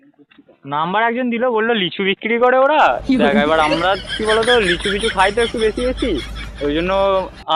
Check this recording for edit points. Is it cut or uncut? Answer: uncut